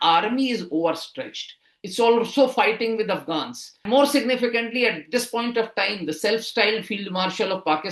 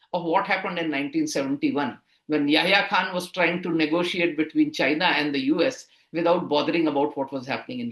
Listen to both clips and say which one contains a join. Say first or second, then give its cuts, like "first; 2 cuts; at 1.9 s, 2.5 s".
first; 1 cut; at 3.7 s